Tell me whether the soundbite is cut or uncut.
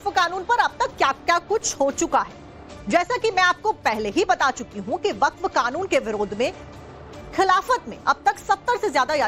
cut